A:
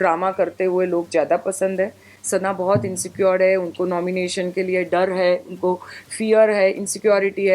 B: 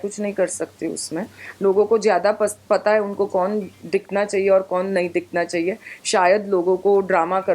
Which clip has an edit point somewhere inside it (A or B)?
A